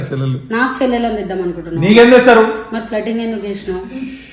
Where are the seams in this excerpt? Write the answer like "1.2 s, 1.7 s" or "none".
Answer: none